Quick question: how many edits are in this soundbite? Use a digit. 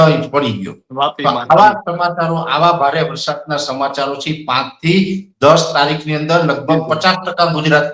0